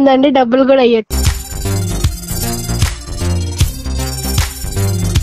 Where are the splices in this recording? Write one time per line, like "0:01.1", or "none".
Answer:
0:00.9